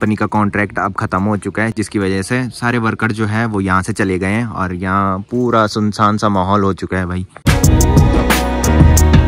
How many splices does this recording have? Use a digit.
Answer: 0